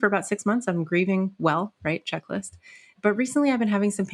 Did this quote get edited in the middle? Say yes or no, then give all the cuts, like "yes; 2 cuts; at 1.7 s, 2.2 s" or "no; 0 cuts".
yes; 1 cut; at 2.9 s